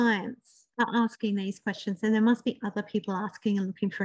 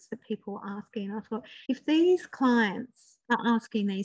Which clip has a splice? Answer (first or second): second